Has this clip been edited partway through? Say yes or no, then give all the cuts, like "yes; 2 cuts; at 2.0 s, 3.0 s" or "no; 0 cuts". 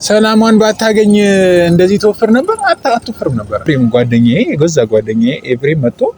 yes; 1 cut; at 3.6 s